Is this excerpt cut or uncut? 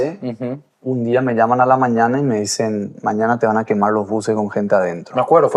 uncut